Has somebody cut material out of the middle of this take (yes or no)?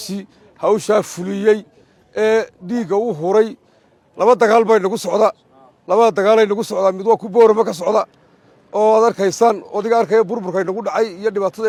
no